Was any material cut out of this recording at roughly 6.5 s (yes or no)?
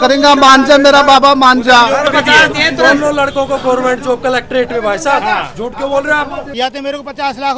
yes